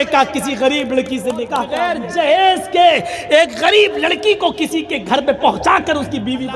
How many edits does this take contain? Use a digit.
1